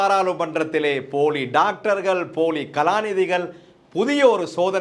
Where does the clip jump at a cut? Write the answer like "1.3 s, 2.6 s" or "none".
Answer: none